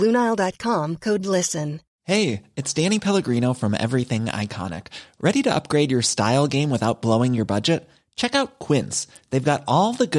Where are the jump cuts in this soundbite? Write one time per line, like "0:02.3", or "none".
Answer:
0:01.9